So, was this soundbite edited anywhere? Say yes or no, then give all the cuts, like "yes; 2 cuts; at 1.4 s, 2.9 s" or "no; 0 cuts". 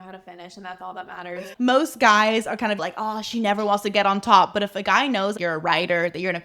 yes; 2 cuts; at 1.5 s, 2.8 s